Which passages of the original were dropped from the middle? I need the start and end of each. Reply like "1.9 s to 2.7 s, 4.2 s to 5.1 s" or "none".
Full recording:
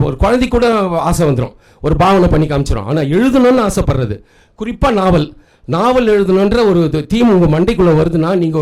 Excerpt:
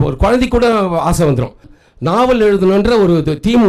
1.7 s to 5.4 s